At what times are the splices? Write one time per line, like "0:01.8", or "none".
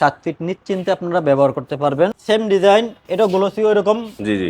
0:02.2